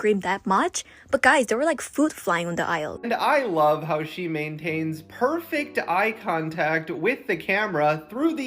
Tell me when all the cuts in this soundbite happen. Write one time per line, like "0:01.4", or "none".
0:03.0